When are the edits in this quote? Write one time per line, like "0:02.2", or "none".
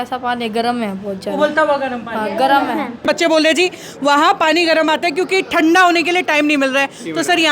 0:03.1